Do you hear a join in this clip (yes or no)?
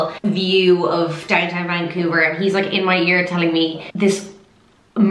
yes